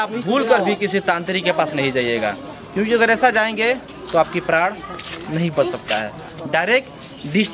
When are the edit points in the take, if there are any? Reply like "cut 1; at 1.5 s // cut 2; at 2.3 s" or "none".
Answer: none